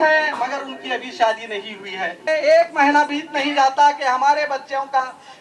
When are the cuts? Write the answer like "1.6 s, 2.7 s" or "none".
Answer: 2.2 s